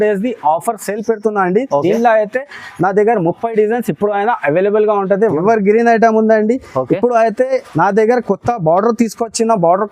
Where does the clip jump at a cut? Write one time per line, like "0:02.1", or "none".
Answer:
0:05.4